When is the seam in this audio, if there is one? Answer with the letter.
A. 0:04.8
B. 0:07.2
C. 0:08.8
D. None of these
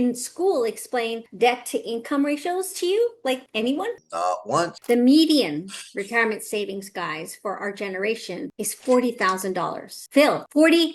A